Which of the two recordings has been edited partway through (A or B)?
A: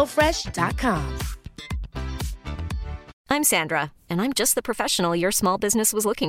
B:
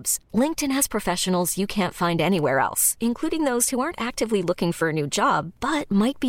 A